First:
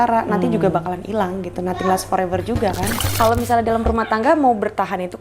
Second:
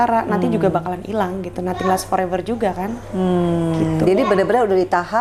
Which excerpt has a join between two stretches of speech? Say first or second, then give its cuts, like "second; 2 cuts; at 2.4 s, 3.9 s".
first; 1 cut; at 3.0 s